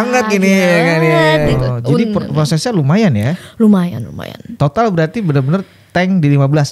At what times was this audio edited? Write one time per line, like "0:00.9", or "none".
0:01.5